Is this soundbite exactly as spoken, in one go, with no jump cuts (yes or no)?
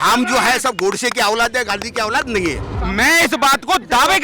no